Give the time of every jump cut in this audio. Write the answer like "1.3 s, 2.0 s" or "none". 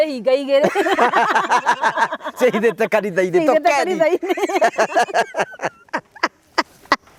none

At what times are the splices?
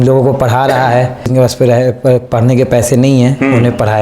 1.3 s

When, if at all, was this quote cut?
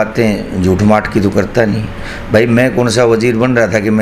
none

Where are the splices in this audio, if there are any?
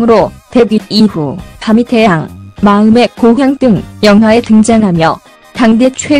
0.9 s

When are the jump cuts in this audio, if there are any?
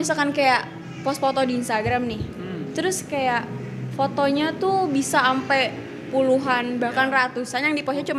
none

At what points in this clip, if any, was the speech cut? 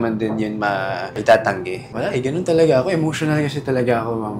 1.8 s

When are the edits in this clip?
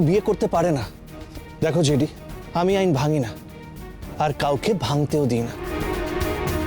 5.6 s

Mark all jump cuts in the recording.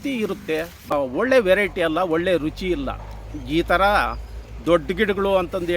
0.9 s

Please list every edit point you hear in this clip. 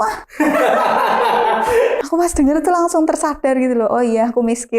2.1 s

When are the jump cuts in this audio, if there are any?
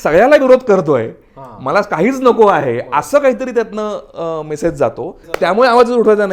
5.3 s

